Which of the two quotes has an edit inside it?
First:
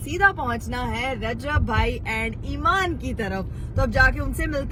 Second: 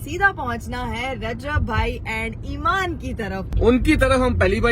second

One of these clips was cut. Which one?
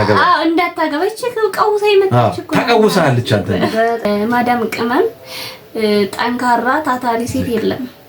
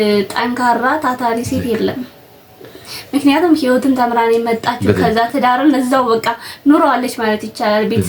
first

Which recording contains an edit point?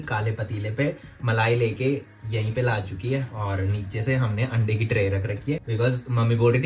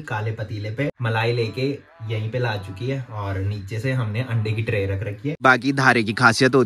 second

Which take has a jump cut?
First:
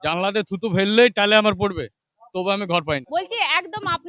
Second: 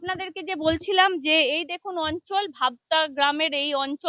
first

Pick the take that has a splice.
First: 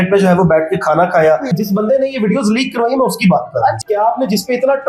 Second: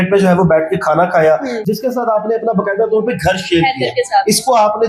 first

